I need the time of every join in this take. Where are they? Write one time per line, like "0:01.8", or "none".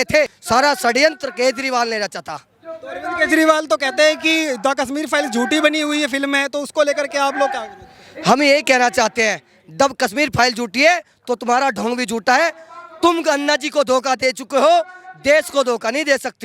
none